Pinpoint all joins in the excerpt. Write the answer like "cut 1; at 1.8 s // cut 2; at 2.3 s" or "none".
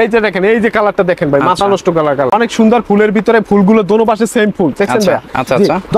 cut 1; at 2.3 s